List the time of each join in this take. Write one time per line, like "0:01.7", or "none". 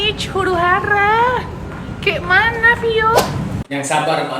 0:03.4